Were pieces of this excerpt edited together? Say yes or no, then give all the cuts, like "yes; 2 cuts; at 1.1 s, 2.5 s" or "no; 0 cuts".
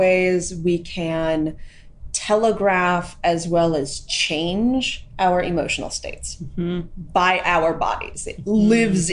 yes; 1 cut; at 5.0 s